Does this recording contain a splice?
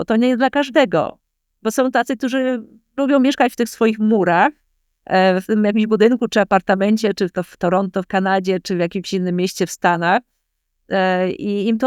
no; 0 cuts

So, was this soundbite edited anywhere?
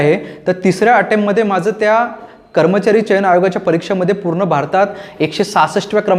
no; 0 cuts

